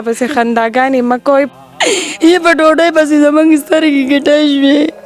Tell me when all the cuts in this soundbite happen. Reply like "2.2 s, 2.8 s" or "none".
1.5 s